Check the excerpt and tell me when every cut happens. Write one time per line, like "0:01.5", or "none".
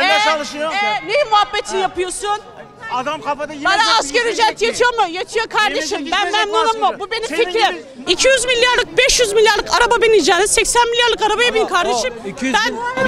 0:07.9